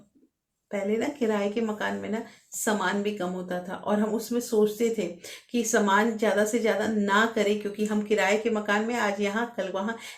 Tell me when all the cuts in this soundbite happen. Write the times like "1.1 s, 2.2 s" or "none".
none